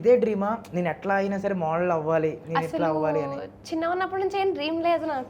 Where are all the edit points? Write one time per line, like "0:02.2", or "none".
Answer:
none